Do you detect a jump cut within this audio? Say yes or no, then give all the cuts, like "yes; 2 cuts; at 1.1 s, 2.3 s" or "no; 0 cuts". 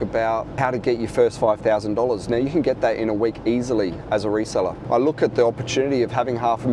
yes; 1 cut; at 4.8 s